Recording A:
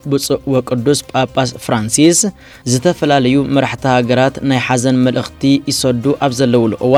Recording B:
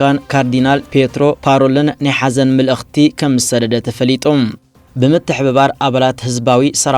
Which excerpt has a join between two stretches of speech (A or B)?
B